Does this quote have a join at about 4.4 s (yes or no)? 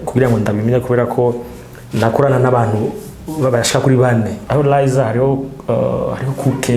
yes